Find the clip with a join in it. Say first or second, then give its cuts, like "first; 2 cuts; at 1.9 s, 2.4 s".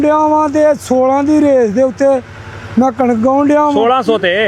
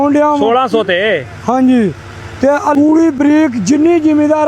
second; 1 cut; at 2.7 s